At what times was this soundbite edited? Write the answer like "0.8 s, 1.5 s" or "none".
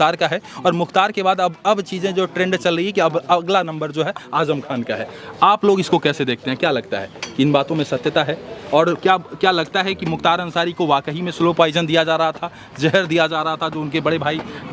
none